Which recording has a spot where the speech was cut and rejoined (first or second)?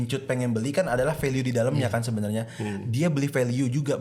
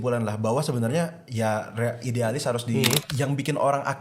second